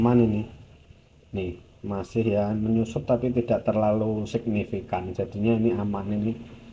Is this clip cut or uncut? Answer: uncut